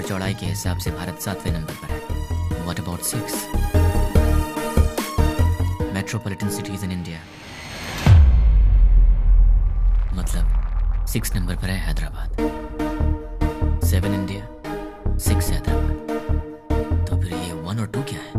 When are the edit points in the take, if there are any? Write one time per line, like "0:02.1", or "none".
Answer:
none